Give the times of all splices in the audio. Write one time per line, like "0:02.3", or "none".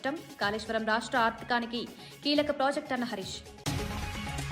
none